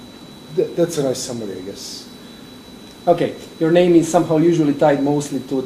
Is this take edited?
no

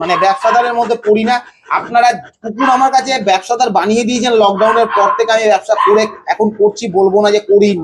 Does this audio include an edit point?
no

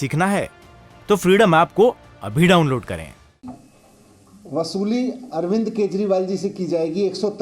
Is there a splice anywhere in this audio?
yes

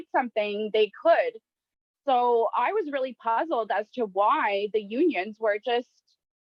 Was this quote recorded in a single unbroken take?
yes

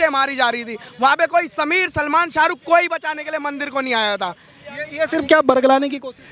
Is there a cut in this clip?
no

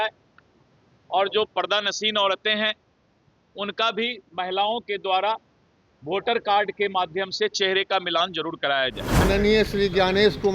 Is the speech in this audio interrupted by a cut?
yes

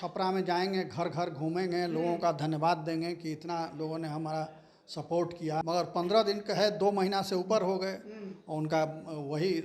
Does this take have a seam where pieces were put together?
yes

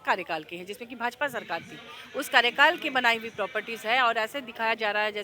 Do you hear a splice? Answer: no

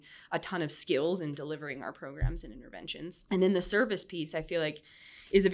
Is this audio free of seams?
no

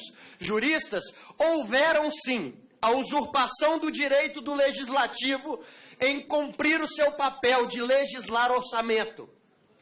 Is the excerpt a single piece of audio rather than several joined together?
yes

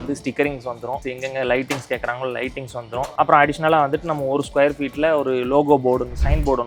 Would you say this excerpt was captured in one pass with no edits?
yes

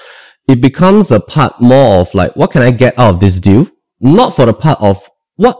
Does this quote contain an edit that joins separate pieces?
yes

